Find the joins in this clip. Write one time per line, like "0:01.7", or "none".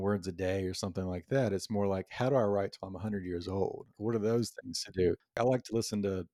0:03.9
0:05.4

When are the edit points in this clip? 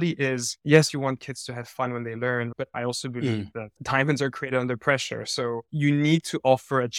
0:00.9
0:02.6

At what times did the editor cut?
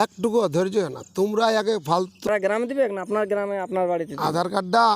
0:02.3

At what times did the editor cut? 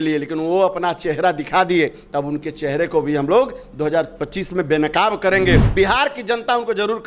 0:05.7

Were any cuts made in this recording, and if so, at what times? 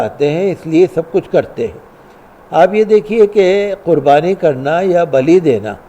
none

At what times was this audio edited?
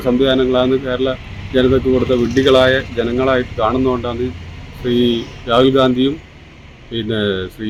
none

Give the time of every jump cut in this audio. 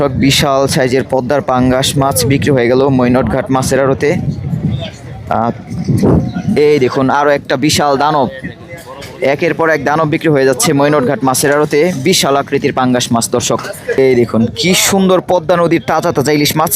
0:14.0

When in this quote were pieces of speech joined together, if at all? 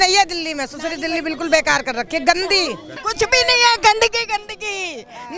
0:03.0

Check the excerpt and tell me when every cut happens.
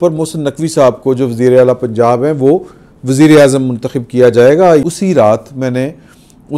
0:04.8

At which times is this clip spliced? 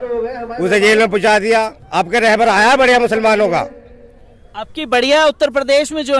none

